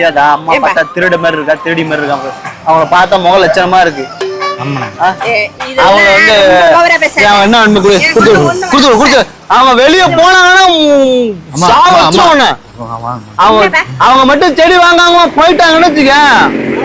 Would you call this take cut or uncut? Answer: uncut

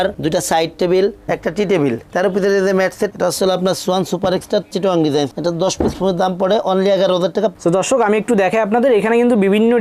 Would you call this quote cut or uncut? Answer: cut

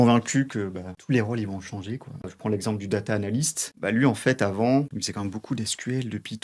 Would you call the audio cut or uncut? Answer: cut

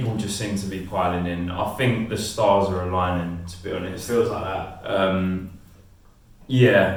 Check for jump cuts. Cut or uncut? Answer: uncut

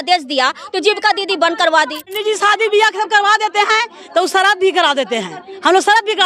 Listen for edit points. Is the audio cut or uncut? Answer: cut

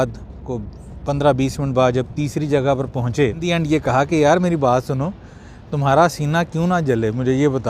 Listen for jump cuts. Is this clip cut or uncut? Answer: cut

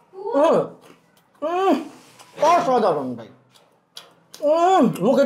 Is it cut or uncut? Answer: uncut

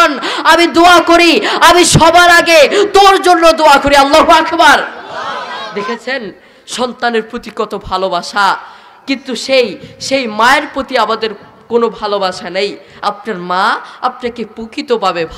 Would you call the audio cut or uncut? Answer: cut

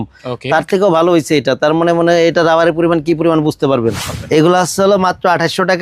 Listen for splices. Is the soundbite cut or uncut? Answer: cut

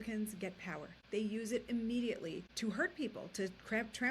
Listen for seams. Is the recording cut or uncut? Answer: cut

